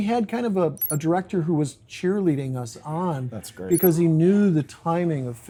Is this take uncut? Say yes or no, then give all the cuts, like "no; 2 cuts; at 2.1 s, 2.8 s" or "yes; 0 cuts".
yes; 0 cuts